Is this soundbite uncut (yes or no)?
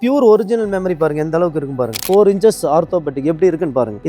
no